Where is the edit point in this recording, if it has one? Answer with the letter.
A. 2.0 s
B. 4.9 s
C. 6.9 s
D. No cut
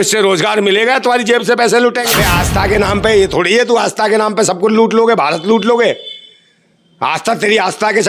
A